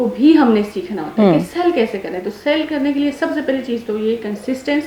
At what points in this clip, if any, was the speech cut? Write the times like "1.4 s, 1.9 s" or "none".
none